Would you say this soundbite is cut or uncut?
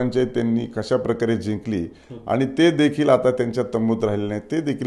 uncut